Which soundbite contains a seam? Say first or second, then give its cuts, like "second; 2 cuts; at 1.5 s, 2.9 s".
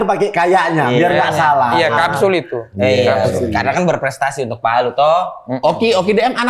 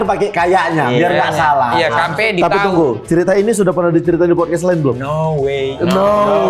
second; 1 cut; at 2.1 s